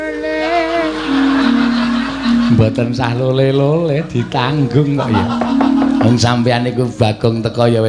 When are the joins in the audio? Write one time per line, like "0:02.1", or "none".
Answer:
none

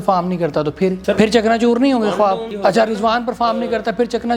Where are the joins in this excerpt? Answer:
0:01.0
0:02.5

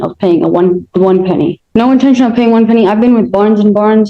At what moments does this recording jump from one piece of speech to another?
0:01.6

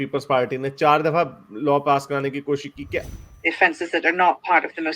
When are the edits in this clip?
0:03.0

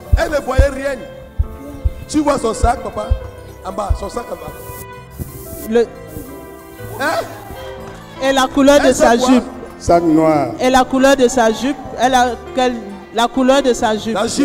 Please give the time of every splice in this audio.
none

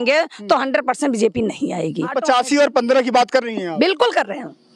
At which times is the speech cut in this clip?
0:02.1

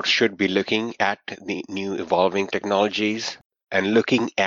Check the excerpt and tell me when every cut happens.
0:03.5

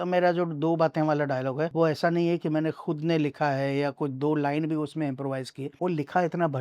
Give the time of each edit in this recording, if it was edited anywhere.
0:01.7
0:05.6

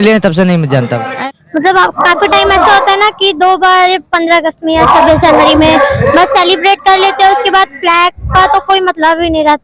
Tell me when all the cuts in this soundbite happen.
0:01.1

